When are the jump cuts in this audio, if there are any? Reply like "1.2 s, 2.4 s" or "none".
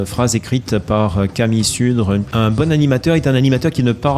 2.3 s